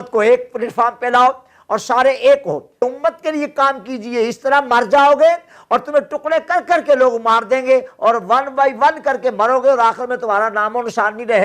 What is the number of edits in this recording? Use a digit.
1